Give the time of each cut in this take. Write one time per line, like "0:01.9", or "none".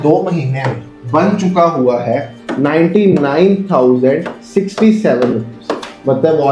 none

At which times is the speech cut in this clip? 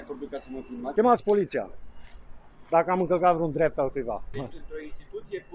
0:00.9
0:04.3

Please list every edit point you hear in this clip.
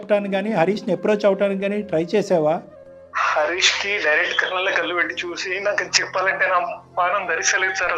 none

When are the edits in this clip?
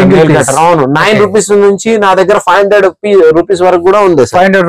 none

